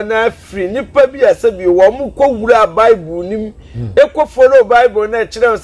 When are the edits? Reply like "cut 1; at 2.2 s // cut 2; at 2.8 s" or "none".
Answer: none